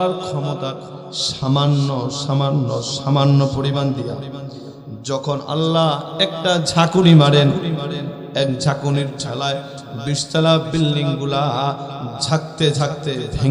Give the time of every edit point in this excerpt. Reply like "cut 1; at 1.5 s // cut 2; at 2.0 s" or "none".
none